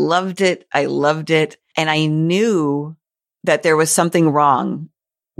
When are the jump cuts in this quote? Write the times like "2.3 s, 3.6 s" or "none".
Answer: 1.6 s